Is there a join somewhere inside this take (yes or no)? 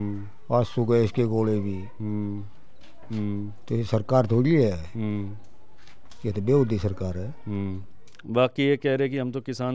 no